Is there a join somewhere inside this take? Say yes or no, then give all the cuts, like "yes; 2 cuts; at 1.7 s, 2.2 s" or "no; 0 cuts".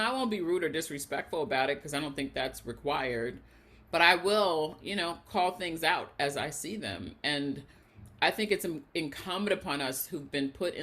no; 0 cuts